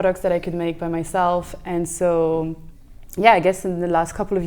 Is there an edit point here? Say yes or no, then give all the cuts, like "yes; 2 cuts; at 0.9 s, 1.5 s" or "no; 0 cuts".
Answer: no; 0 cuts